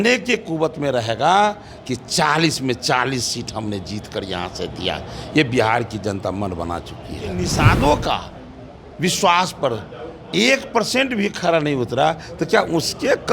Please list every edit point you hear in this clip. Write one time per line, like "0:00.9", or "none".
0:07.5